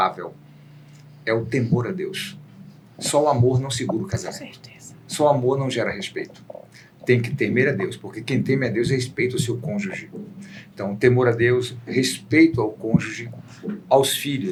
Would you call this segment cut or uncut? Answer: uncut